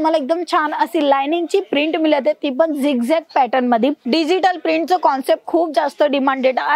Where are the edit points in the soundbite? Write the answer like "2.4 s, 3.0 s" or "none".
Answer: 4.0 s